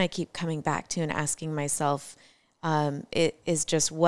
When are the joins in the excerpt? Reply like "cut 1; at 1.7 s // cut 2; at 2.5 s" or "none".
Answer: none

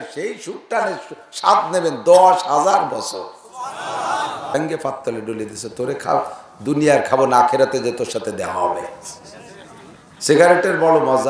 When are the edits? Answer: cut 1; at 4.5 s

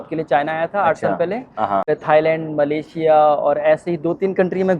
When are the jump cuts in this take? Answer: cut 1; at 1.9 s

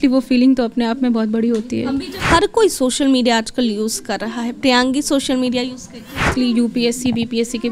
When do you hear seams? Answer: cut 1; at 2.2 s // cut 2; at 6.3 s

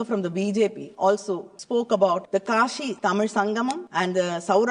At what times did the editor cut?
cut 1; at 1.1 s // cut 2; at 2.6 s // cut 3; at 3.8 s

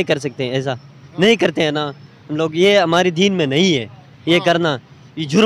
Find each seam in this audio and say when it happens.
none

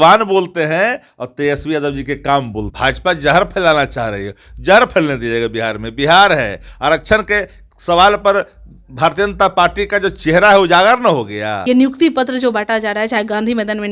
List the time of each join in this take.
cut 1; at 2.6 s // cut 2; at 11.5 s

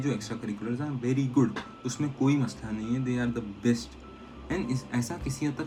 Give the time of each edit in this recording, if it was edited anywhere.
none

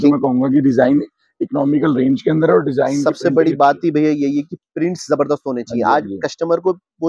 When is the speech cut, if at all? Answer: none

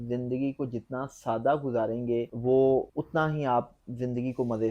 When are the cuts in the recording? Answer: cut 1; at 2.3 s // cut 2; at 2.9 s

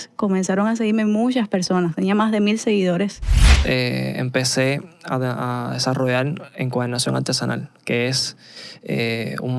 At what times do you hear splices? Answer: cut 1; at 3.5 s

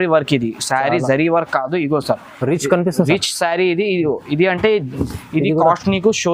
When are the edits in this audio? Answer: cut 1; at 5.0 s

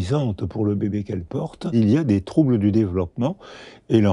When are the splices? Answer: cut 1; at 1.7 s

